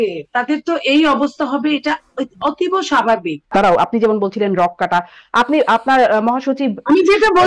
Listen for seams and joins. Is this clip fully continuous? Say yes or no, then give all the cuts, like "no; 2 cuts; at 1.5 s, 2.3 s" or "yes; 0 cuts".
no; 1 cut; at 3.5 s